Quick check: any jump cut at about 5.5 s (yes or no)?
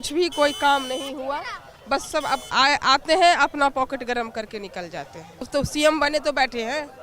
yes